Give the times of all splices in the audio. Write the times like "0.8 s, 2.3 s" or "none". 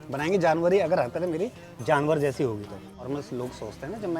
3.0 s

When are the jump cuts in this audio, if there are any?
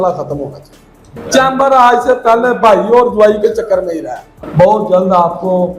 1.1 s, 4.3 s

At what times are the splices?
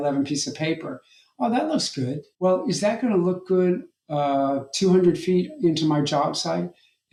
none

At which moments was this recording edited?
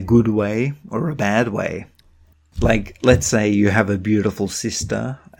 2.3 s

